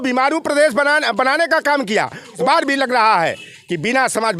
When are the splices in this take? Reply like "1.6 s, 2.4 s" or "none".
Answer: 2.4 s